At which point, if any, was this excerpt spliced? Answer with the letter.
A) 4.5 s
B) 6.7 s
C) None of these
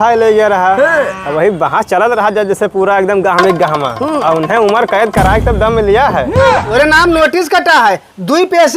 B